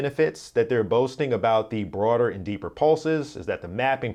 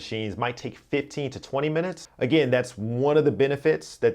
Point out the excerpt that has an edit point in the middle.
second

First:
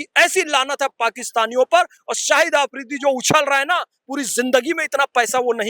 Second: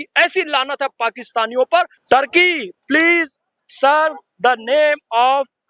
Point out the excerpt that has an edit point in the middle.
second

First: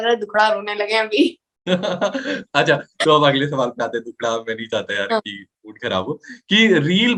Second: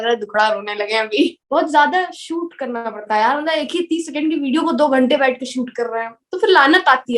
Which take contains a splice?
second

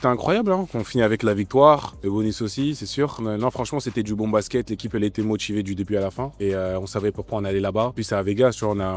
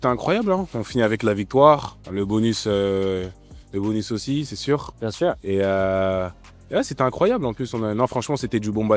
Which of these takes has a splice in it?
first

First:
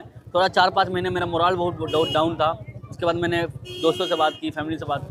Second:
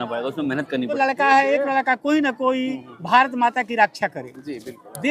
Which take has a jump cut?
second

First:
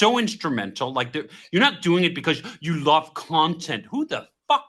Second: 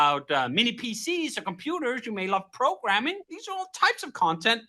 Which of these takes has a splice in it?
second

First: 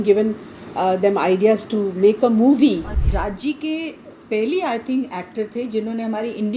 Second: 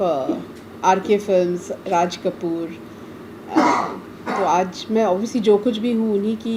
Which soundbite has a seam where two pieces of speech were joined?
first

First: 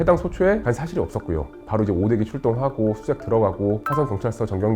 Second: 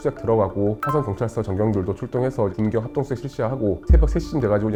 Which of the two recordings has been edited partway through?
first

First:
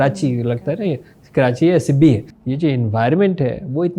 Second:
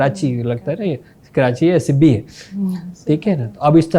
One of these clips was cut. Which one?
first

